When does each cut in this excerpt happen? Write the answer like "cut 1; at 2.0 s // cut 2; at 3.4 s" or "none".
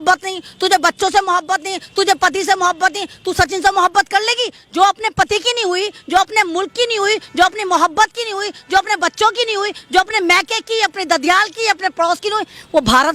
none